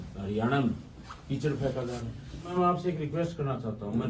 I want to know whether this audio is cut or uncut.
cut